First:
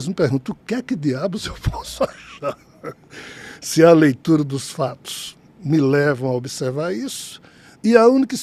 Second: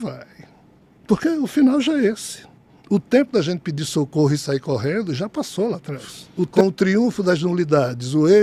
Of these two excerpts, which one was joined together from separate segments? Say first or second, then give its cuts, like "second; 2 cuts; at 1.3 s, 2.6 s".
second; 1 cut; at 6.5 s